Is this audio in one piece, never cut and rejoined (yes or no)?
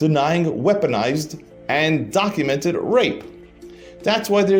yes